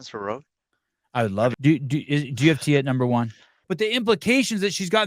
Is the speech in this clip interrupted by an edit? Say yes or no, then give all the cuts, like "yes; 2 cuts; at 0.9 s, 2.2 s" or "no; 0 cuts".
yes; 2 cuts; at 1.5 s, 3.6 s